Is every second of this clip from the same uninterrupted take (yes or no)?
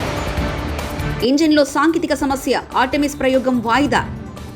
yes